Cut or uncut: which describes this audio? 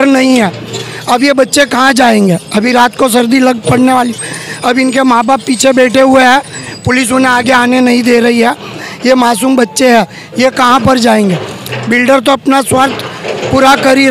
uncut